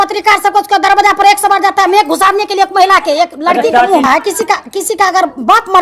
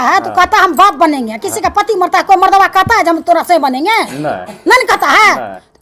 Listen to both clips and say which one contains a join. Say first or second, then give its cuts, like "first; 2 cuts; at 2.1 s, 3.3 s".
first; 1 cut; at 4.1 s